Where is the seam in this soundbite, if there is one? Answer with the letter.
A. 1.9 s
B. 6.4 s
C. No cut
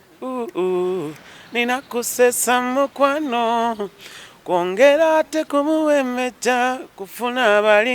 C